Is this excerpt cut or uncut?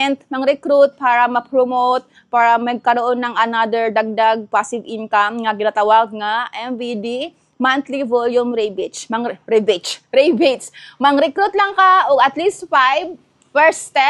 uncut